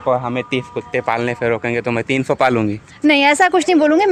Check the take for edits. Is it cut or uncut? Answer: uncut